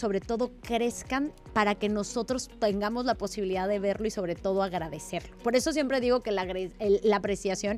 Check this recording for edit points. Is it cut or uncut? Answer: uncut